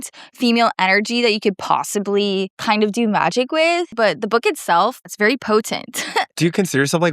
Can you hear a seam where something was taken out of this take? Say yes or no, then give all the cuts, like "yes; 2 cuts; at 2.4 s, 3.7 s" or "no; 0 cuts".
yes; 4 cuts; at 2.5 s, 3.9 s, 5.1 s, 6.3 s